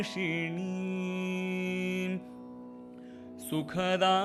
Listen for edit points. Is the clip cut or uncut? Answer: uncut